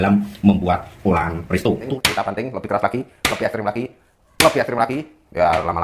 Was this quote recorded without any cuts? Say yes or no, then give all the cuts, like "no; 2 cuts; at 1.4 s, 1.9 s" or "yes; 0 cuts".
no; 1 cut; at 1.9 s